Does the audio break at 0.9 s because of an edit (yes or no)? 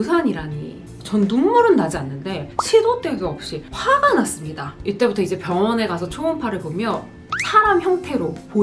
yes